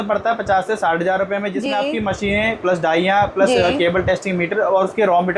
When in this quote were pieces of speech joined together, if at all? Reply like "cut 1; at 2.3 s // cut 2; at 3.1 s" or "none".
none